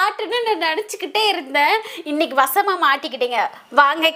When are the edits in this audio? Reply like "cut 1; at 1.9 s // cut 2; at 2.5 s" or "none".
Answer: none